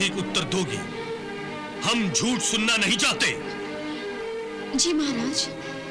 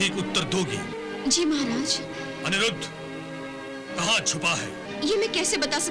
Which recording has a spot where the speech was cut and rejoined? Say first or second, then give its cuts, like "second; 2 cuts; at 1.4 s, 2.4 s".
second; 2 cuts; at 1.0 s, 4.9 s